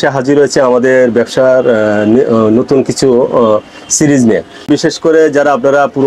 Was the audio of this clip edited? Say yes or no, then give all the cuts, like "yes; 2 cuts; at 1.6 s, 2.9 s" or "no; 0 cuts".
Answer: yes; 1 cut; at 4.6 s